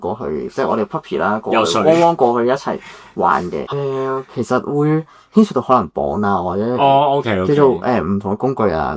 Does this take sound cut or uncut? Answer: cut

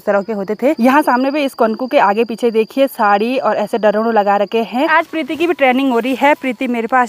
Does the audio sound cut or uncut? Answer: cut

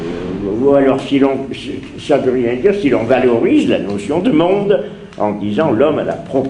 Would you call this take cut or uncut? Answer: uncut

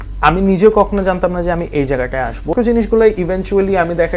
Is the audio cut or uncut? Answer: cut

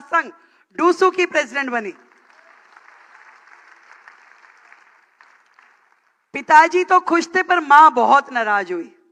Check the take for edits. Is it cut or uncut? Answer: uncut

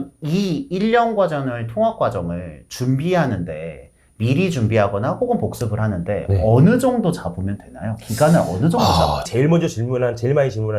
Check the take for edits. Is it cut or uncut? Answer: cut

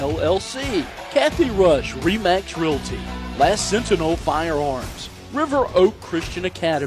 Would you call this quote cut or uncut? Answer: cut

